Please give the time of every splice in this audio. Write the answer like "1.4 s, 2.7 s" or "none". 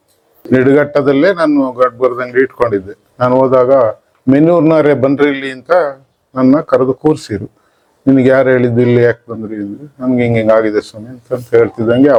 none